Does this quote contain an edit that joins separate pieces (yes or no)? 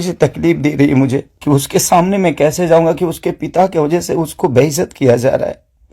yes